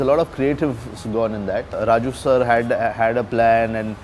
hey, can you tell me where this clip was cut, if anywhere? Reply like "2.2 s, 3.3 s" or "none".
1.7 s